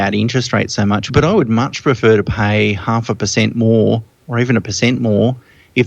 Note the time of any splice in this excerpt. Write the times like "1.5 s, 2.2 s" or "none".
1.1 s